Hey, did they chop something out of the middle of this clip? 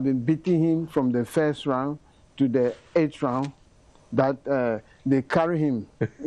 no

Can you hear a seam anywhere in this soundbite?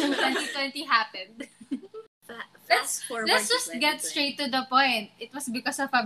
yes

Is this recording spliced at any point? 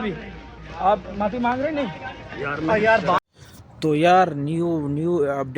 yes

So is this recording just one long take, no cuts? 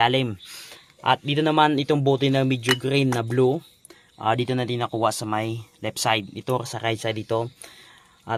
yes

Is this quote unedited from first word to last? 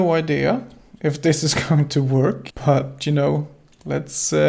no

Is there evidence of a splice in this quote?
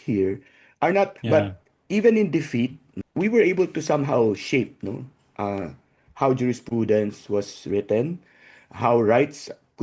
yes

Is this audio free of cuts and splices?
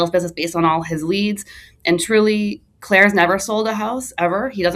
yes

